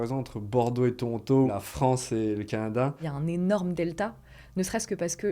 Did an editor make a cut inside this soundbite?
yes; 2 cuts; at 1.5 s, 3.1 s

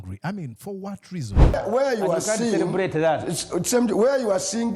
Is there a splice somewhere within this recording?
yes; 1 cut; at 1.6 s

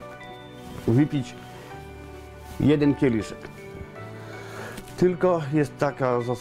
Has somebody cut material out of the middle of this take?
no; 0 cuts

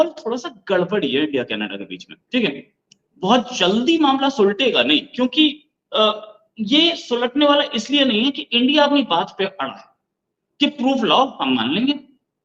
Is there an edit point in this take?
no; 0 cuts

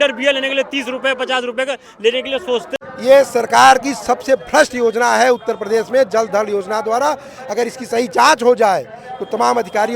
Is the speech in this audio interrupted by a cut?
yes; 1 cut; at 2.7 s

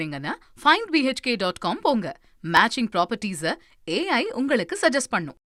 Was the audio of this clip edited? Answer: no; 0 cuts

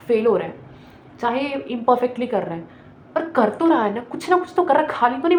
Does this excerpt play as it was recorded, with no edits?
yes; 0 cuts

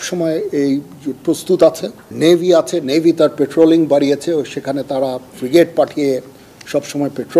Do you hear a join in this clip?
no; 0 cuts

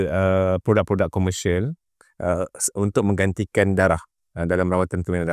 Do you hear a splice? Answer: no; 0 cuts

